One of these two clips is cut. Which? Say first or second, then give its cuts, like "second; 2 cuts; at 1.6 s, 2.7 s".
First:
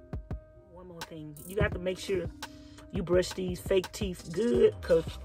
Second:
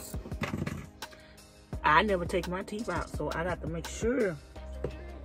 first; 1 cut; at 1.0 s